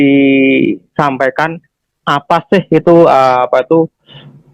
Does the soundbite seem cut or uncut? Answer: uncut